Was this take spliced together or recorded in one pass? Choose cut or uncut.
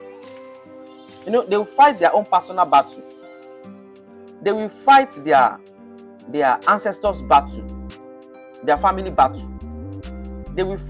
uncut